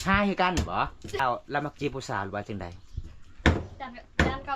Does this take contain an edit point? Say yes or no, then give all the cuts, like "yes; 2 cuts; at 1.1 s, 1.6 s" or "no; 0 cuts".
yes; 1 cut; at 1.2 s